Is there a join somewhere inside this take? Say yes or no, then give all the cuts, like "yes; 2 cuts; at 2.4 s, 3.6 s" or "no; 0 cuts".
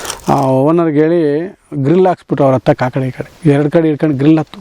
yes; 1 cut; at 3.2 s